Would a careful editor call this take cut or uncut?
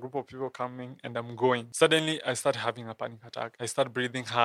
cut